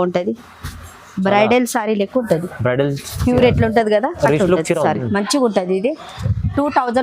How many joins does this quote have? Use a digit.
1